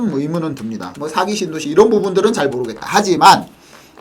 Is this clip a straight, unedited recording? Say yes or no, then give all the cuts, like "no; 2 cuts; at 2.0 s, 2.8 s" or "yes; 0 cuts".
no; 1 cut; at 0.9 s